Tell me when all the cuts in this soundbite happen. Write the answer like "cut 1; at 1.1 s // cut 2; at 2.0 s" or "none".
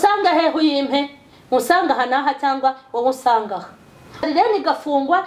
cut 1; at 4.2 s